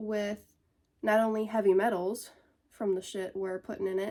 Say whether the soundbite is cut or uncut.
uncut